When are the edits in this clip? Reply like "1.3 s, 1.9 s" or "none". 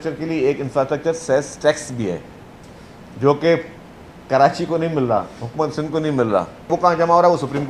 6.7 s